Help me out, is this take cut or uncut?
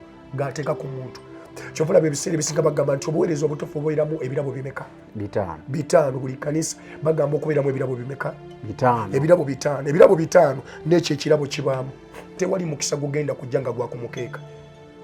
cut